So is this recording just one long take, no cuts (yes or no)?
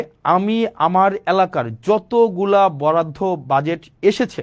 yes